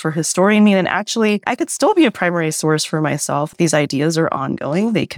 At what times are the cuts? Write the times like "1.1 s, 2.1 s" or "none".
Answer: 1.5 s, 3.5 s